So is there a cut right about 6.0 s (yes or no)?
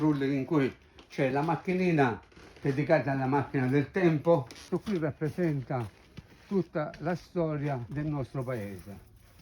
no